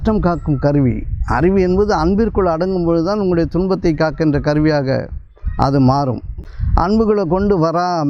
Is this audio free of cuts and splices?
no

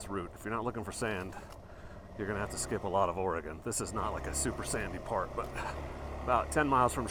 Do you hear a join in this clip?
no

